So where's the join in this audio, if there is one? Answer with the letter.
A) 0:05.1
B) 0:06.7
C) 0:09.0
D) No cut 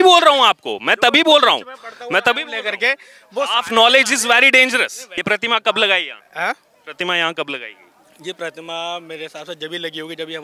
A